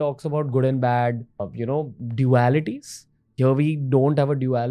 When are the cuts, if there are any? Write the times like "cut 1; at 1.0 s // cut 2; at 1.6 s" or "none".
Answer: cut 1; at 1.5 s